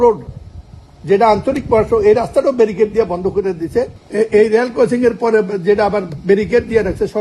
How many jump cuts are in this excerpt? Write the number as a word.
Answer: one